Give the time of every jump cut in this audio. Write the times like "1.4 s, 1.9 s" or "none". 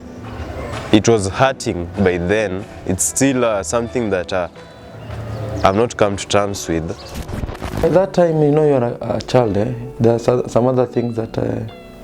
7.1 s